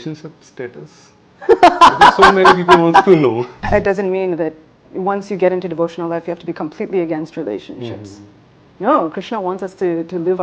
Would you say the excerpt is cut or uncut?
cut